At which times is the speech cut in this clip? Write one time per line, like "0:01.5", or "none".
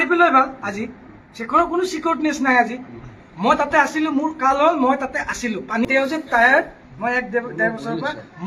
0:05.9